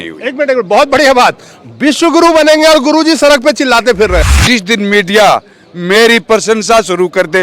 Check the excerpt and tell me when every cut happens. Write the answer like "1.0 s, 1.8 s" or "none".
4.2 s